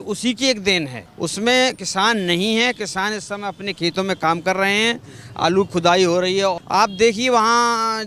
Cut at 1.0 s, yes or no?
yes